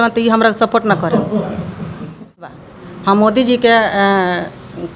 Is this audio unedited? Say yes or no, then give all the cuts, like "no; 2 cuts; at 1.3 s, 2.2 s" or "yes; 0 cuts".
no; 1 cut; at 2.6 s